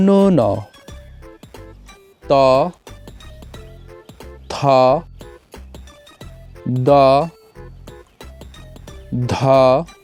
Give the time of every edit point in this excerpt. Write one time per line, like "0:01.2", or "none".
none